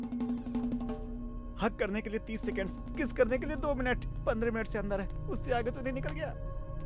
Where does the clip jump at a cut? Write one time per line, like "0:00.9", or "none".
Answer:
0:01.1